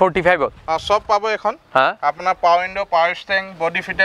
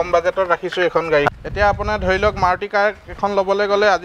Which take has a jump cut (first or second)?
second